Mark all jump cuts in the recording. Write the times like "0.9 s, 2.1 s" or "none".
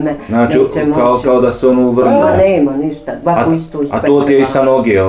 none